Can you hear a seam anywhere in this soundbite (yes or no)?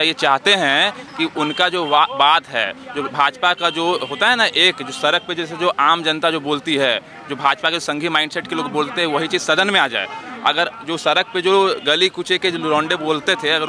no